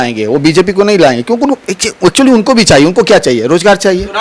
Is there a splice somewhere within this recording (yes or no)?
no